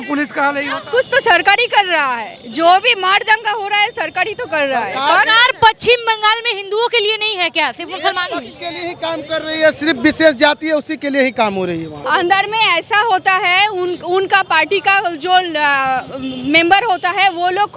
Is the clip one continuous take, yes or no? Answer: no